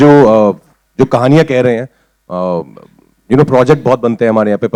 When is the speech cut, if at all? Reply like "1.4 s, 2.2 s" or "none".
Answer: none